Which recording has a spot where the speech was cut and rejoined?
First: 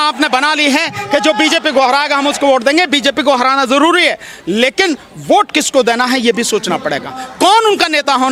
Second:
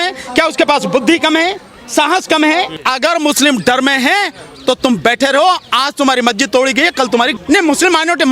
second; 2 cuts; at 2.8 s, 7.4 s

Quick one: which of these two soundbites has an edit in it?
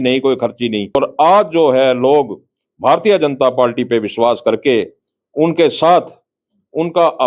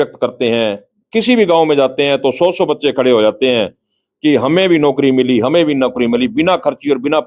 first; 1 cut; at 0.9 s

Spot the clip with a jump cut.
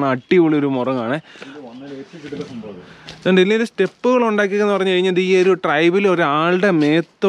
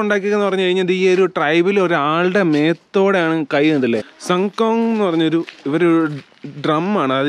second; 1 cut; at 4.1 s

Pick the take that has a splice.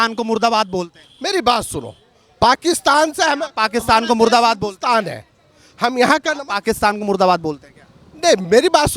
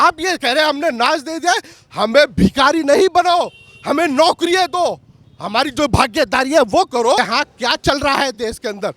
second; 1 cut; at 7.2 s

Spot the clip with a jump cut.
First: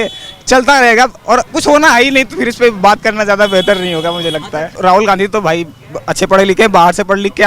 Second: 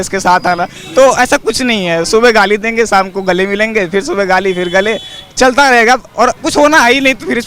first; 1 cut; at 4.7 s

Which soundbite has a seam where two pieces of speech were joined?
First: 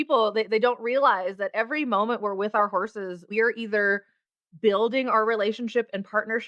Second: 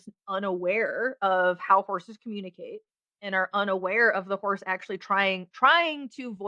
first; 1 cut; at 3.3 s

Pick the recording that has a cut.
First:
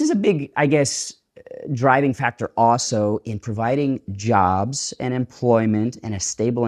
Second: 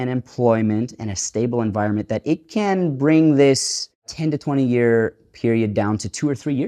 second; 1 cut; at 4.1 s

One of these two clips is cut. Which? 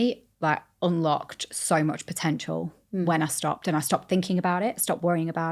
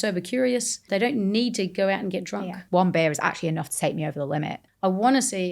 second; 3 cuts; at 0.8 s, 2.6 s, 4.6 s

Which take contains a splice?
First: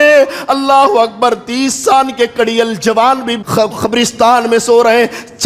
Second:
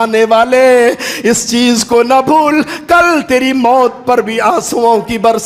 first; 1 cut; at 3.4 s

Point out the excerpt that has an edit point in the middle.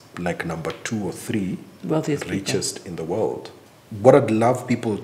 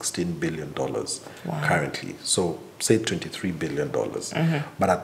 first; 1 cut; at 3.5 s

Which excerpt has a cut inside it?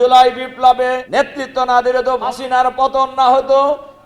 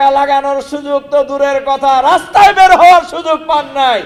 first; 2 cuts; at 1.0 s, 2.3 s

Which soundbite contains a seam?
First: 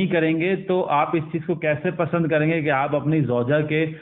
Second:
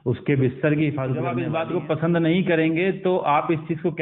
second; 1 cut; at 1.4 s

